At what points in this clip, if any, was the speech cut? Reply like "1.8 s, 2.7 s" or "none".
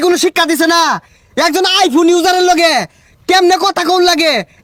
none